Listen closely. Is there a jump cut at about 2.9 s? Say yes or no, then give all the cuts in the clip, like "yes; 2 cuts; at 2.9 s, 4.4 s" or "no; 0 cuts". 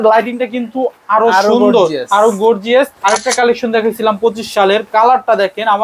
yes; 1 cut; at 2.9 s